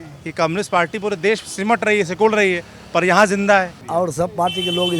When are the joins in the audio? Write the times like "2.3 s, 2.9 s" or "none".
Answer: 3.8 s